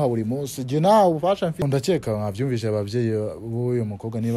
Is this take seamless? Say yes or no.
no